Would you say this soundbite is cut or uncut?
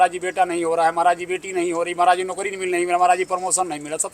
uncut